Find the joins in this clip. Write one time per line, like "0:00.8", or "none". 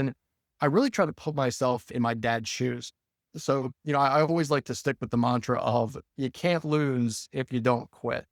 none